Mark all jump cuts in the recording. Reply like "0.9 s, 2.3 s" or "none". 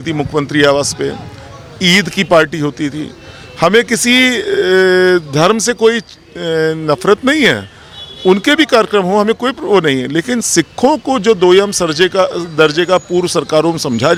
none